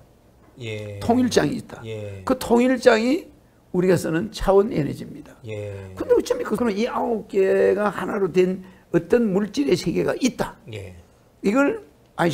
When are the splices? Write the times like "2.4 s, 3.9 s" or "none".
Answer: 6.6 s